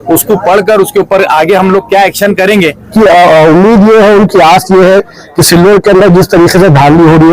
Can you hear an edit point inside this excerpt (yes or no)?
yes